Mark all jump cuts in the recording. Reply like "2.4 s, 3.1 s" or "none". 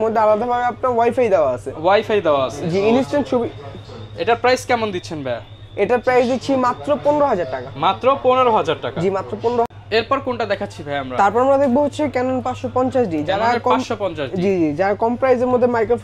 none